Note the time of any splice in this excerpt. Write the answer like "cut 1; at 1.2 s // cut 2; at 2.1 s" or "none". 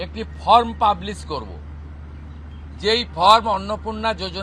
none